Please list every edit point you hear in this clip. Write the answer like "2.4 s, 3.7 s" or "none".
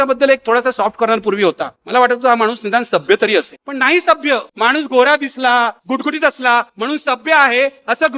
none